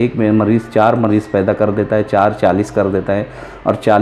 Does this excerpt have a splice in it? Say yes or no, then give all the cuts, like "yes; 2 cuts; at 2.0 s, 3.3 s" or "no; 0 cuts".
no; 0 cuts